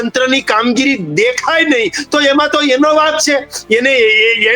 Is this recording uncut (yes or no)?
yes